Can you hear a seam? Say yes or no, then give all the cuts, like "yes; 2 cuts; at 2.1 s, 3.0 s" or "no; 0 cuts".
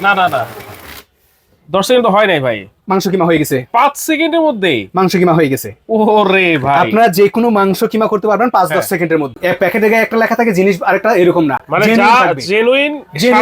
yes; 1 cut; at 9.3 s